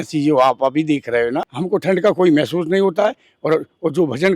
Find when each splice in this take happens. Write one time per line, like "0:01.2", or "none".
0:01.5